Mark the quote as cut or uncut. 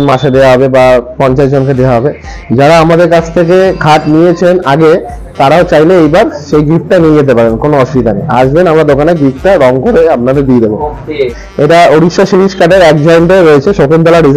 cut